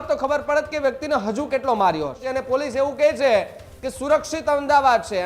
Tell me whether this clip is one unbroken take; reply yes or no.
no